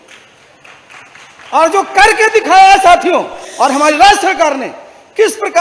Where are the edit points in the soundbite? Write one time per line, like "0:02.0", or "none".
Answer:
0:03.4